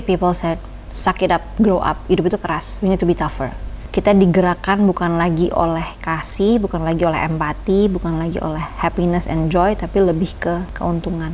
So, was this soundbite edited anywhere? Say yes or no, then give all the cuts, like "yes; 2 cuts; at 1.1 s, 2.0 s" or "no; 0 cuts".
no; 0 cuts